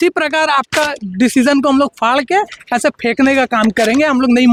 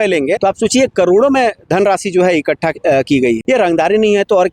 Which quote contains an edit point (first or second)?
second